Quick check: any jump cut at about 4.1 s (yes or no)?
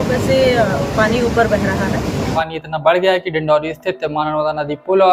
no